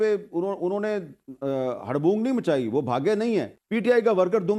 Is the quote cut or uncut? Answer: uncut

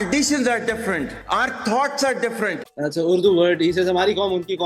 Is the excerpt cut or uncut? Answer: cut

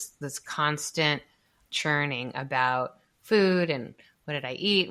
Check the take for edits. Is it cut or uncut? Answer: uncut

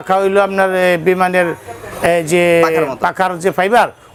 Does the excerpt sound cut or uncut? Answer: uncut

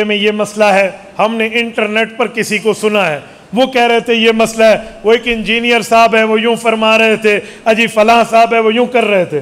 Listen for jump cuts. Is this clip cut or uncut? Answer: uncut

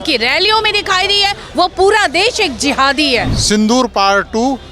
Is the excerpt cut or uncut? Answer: cut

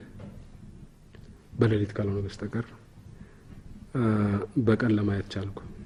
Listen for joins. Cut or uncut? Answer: uncut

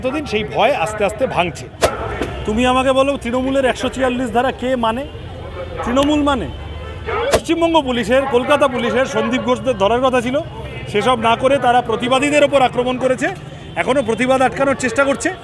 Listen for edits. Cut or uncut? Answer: cut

